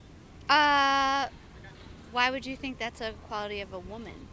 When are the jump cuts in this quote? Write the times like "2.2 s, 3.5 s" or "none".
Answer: none